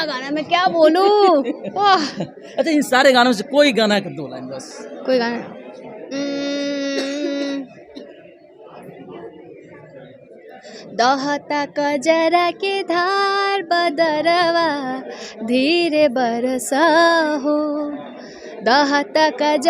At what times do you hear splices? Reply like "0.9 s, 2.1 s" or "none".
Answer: none